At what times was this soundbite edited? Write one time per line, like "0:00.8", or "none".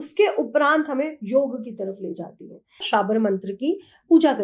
0:02.8